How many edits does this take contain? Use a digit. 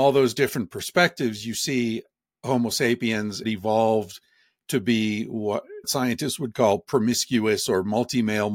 2